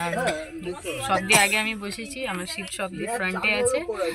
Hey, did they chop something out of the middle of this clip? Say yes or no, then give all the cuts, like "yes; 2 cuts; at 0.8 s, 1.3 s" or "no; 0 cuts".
no; 0 cuts